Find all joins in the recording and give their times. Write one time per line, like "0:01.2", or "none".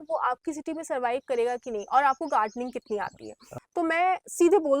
0:03.5